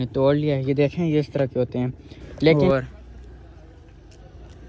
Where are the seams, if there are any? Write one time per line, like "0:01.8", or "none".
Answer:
0:02.5